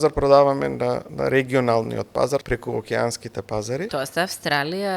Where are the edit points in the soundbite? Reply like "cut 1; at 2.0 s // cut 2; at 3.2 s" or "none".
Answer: cut 1; at 1.1 s // cut 2; at 2.4 s // cut 3; at 3.9 s